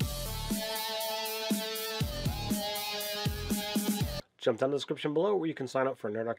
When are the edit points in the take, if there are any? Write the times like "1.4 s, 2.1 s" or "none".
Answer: 4.1 s